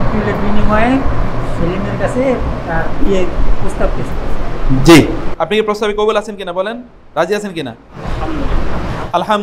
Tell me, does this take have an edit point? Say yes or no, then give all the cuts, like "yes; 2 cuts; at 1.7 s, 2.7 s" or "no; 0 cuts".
no; 0 cuts